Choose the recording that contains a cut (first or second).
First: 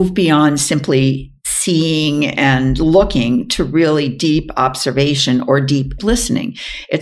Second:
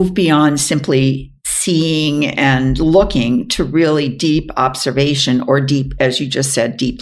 first